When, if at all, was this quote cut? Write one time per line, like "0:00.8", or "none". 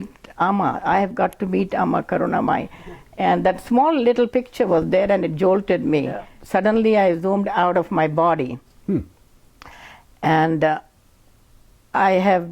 0:06.3